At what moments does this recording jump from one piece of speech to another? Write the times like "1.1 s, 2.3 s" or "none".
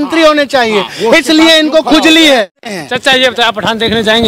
2.6 s